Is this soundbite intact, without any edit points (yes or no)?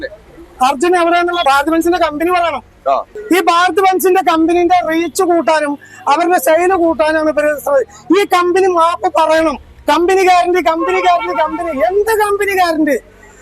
no